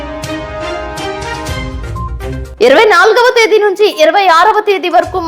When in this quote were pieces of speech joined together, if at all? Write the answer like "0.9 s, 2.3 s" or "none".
2.4 s